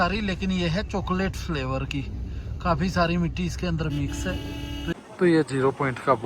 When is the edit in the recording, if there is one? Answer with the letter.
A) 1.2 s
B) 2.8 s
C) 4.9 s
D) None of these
C